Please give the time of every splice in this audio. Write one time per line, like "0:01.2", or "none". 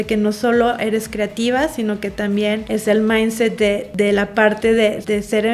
none